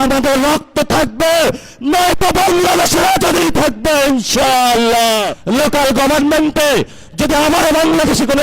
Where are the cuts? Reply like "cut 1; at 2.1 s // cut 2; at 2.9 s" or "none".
cut 1; at 5.3 s